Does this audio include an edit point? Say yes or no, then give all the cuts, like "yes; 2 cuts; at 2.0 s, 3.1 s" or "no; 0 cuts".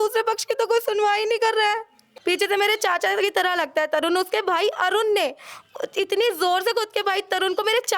yes; 1 cut; at 2.1 s